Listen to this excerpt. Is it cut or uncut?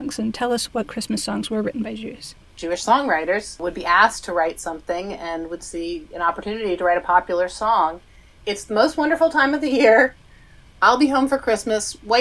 cut